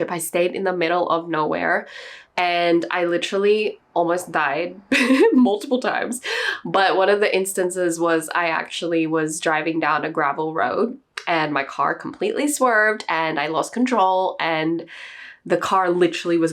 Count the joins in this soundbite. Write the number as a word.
zero